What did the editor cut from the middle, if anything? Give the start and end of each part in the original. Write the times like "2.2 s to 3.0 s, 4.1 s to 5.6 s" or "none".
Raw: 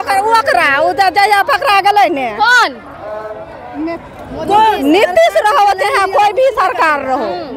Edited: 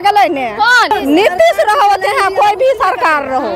2.7 s to 4.7 s